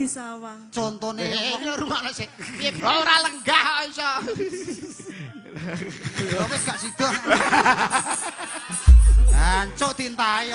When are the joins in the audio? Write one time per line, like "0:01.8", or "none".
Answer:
0:02.8